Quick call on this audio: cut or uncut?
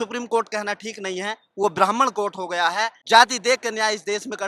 cut